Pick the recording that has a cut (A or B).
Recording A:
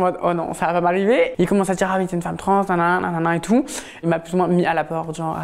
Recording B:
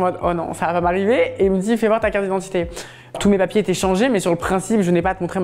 A